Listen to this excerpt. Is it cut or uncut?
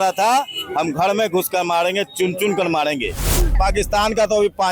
cut